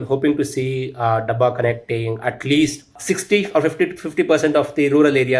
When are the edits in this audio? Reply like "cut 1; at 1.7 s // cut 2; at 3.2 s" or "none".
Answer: cut 1; at 3.0 s